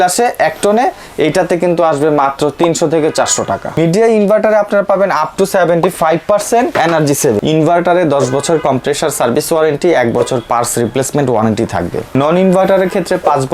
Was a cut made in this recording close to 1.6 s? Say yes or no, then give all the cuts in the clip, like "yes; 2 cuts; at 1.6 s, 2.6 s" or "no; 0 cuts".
no; 3 cuts; at 3.8 s, 7.0 s, 12.1 s